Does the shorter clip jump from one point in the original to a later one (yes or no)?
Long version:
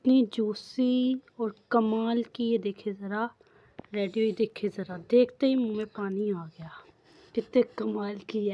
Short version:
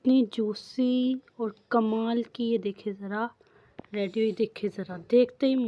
no